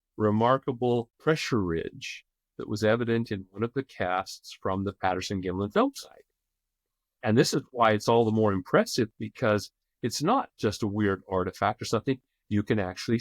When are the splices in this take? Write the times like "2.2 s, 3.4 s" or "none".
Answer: 1.1 s